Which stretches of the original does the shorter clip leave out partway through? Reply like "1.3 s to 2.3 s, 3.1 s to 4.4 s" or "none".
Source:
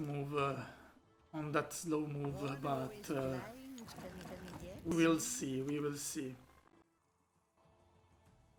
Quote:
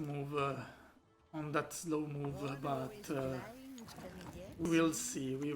4.4 s to 4.7 s